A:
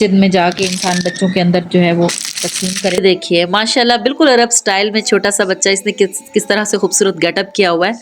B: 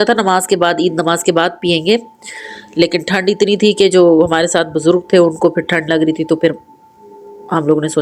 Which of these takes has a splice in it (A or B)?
A